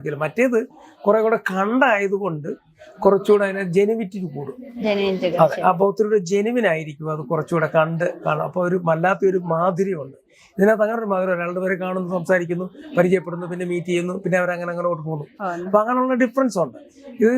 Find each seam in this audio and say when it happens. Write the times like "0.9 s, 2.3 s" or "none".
none